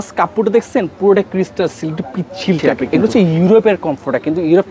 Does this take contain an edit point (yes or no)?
yes